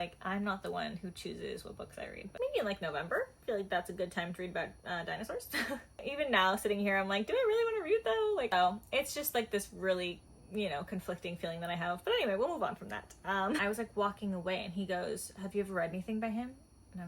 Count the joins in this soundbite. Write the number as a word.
four